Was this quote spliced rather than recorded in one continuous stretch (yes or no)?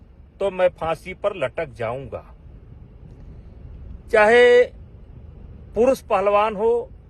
yes